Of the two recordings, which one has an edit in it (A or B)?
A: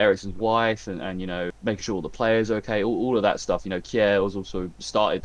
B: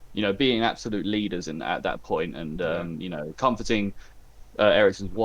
A